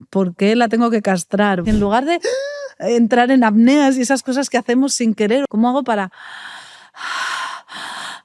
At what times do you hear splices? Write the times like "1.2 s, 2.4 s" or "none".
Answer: 1.6 s, 5.5 s